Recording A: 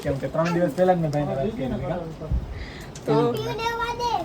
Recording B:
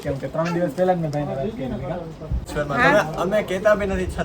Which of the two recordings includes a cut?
B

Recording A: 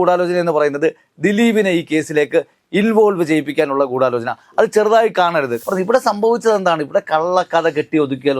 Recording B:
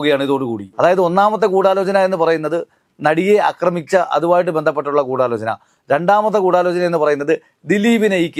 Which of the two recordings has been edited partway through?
A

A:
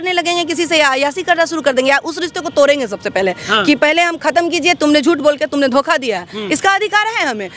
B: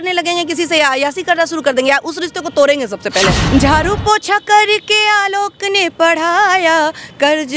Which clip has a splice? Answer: B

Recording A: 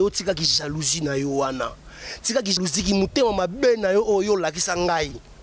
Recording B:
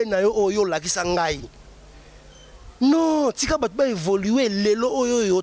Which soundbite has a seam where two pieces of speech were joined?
A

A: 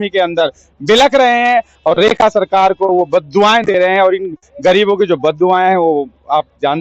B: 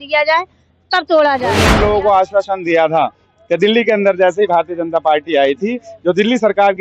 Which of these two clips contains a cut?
B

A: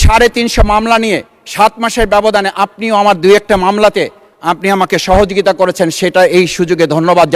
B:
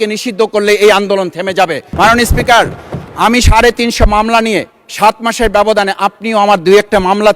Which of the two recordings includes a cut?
B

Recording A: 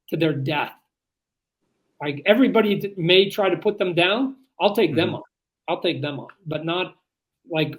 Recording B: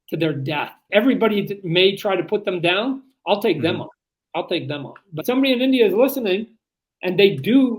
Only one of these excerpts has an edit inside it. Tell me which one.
B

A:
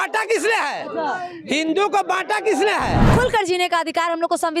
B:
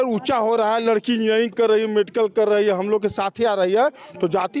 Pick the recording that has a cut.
A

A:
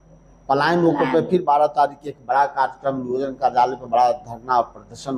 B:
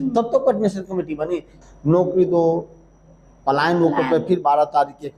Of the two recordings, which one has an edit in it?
B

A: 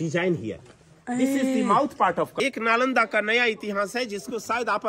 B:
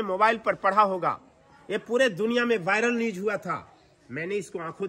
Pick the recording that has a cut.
A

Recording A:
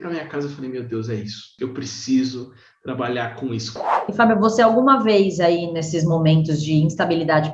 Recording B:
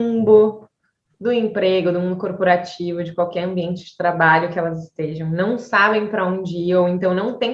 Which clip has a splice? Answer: A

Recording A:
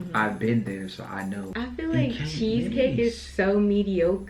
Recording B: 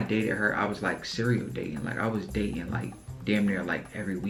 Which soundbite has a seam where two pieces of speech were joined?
A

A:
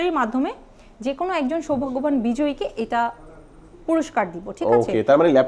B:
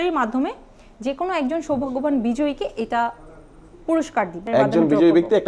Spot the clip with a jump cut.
B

